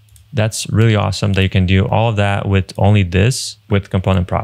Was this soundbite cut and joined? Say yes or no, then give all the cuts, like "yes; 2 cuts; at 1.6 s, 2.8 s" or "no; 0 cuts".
yes; 2 cuts; at 1.9 s, 3.5 s